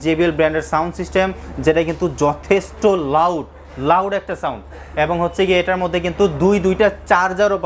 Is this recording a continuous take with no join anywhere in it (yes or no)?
yes